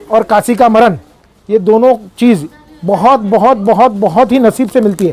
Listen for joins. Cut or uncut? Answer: uncut